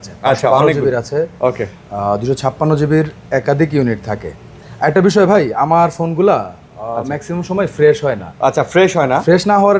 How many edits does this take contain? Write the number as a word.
zero